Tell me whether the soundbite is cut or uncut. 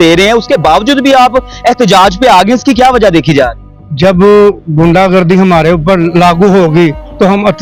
uncut